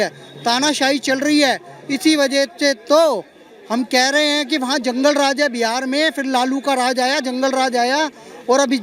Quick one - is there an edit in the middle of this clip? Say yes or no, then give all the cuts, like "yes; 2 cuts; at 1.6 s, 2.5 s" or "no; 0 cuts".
no; 0 cuts